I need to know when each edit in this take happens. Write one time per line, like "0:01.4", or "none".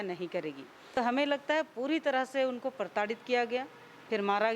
0:01.0

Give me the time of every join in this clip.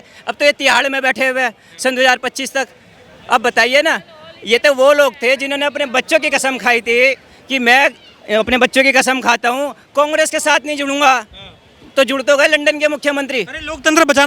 none

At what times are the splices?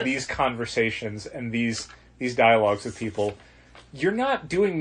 none

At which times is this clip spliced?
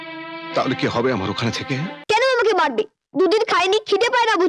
0:02.0

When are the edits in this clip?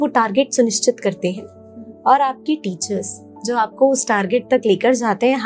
none

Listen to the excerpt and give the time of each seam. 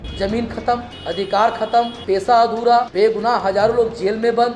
0:00.9
0:02.0
0:02.9

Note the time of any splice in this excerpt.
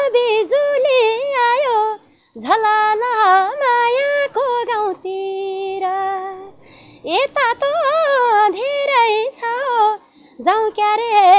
none

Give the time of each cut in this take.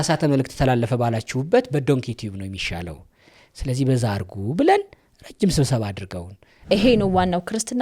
0:06.7

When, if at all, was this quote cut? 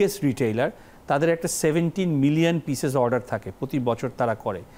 none

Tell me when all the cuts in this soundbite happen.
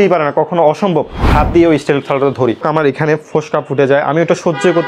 0:01.2

